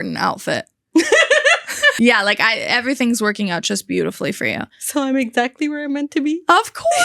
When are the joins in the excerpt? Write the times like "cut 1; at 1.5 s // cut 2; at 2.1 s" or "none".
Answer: cut 1; at 1.9 s